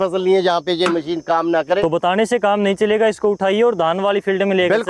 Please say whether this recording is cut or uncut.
cut